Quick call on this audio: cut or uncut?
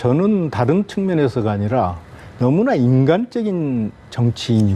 uncut